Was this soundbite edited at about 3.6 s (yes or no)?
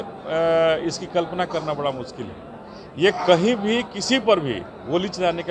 no